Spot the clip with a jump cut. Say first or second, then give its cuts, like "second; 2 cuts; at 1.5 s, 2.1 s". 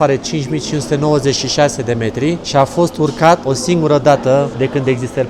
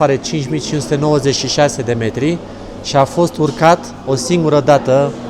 first; 3 cuts; at 2.4 s, 3.5 s, 4.5 s